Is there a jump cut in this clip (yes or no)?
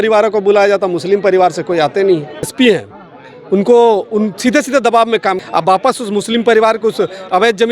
yes